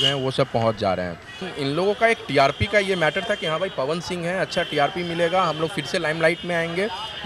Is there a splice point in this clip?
yes; 1 cut; at 1.5 s

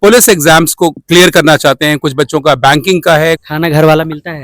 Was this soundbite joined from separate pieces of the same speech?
yes; 2 cuts; at 1.0 s, 3.5 s

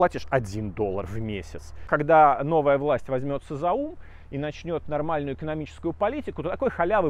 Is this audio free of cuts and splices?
no; 1 cut; at 1.9 s

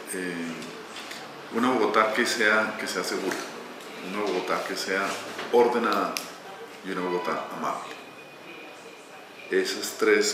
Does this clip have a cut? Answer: no; 0 cuts

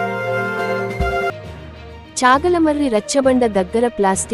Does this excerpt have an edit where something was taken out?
yes; 1 cut; at 1.3 s

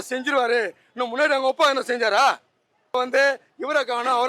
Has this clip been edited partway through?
yes; 1 cut; at 2.9 s

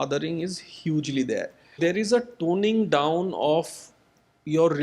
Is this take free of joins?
no; 1 cut; at 1.7 s

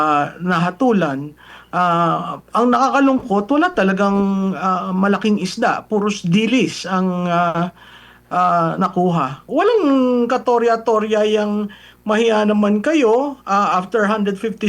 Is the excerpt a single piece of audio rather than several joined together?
no; 1 cut; at 9.4 s

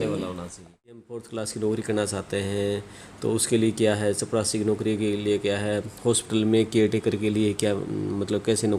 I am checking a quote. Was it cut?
yes; 1 cut; at 1.2 s

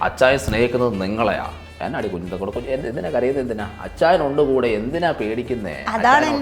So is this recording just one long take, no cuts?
no; 1 cut; at 1.8 s

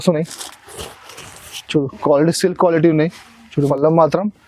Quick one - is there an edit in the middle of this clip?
yes; 1 cut; at 3.5 s

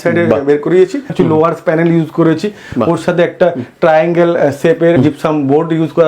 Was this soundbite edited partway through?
yes; 2 cuts; at 1.1 s, 5.0 s

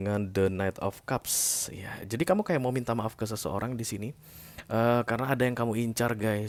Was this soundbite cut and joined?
no; 0 cuts

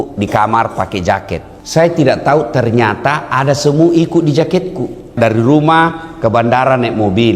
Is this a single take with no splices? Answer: no; 2 cuts; at 1.5 s, 5.2 s

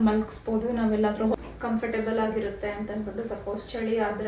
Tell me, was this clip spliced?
yes; 1 cut; at 1.3 s

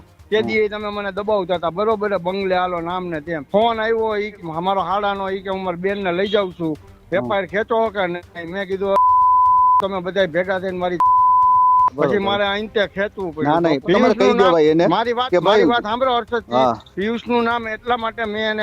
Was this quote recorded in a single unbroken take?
no; 4 cuts; at 3.4 s, 4.3 s, 12.0 s, 13.8 s

